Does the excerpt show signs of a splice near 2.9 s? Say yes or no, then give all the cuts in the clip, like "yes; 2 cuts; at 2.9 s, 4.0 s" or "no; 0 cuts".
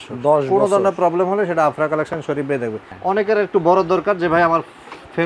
yes; 1 cut; at 2.9 s